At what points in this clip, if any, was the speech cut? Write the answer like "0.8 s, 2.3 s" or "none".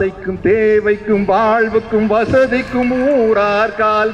none